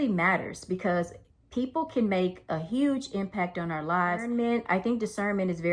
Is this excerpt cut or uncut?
cut